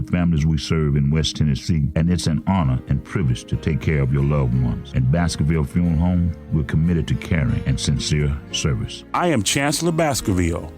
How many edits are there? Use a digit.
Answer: 1